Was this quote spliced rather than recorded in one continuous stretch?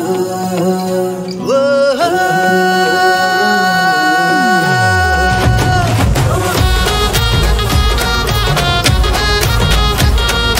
no; 0 cuts

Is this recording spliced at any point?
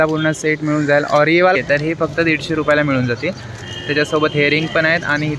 yes; 1 cut; at 1.6 s

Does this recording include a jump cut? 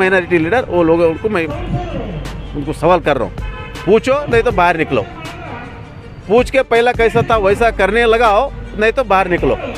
no; 0 cuts

